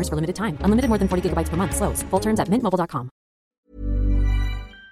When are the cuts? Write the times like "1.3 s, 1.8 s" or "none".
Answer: 3.5 s